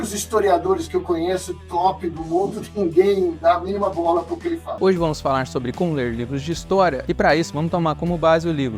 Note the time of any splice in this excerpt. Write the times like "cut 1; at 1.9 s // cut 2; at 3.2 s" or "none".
cut 1; at 4.7 s